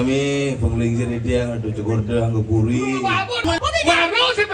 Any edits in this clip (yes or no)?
yes